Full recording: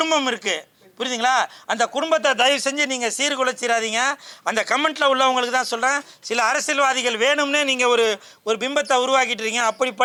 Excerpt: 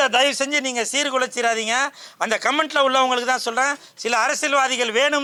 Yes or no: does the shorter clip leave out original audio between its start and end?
no